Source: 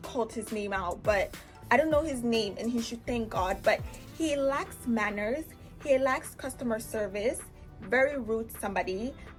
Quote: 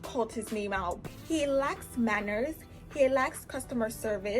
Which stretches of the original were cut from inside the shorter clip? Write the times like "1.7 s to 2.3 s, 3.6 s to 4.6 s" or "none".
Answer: 1.0 s to 3.9 s